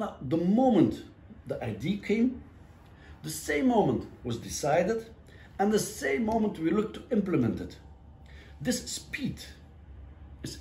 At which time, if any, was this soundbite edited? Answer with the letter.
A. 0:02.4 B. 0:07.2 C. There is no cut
C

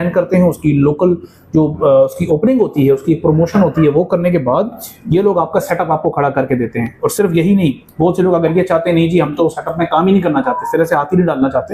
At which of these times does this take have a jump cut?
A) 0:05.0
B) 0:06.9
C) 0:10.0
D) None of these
D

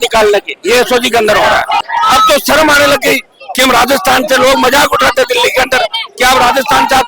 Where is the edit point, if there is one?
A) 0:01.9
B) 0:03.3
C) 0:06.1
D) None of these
A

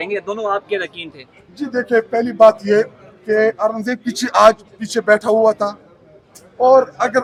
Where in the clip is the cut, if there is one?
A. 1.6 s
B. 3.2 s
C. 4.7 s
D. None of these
D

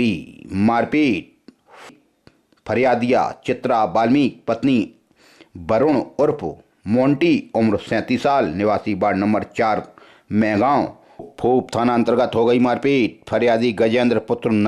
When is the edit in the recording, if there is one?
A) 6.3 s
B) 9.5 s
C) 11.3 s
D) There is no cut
C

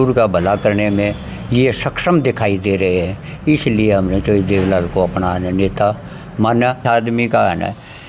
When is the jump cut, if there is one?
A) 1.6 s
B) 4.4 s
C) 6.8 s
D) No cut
C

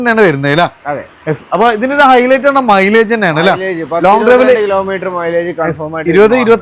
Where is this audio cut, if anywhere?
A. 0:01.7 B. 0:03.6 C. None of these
C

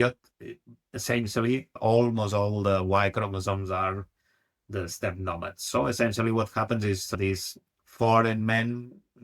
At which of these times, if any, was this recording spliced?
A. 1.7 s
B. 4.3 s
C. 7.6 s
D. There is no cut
D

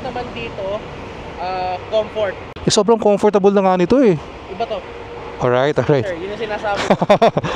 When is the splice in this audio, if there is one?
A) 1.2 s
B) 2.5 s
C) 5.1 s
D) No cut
B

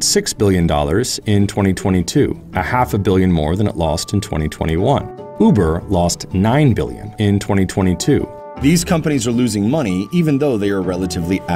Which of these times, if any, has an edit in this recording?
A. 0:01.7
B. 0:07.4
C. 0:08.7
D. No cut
D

